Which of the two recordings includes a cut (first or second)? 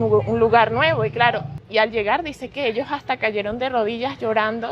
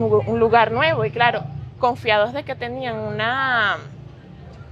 first